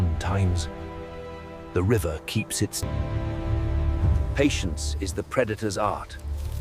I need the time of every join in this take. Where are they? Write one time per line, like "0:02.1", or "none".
0:02.8